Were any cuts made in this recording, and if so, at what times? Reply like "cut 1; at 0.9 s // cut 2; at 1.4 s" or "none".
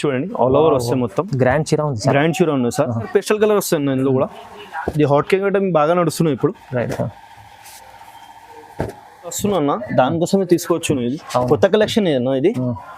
cut 1; at 3.1 s // cut 2; at 9.4 s